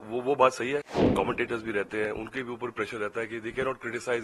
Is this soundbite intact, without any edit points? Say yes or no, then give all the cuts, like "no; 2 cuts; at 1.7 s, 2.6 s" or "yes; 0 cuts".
no; 1 cut; at 0.9 s